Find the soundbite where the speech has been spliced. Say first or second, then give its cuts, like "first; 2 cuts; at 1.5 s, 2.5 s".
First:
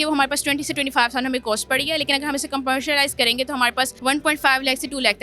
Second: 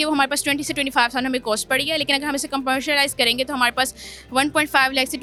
first; 1 cut; at 3.9 s